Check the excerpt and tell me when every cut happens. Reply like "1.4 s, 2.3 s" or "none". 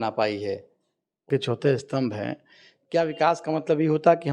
1.3 s